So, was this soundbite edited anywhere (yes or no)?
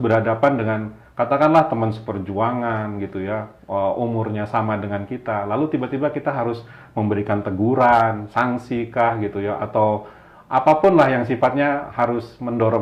no